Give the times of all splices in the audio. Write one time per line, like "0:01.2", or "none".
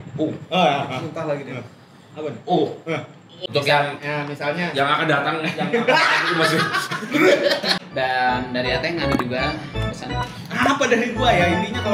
0:03.3
0:07.7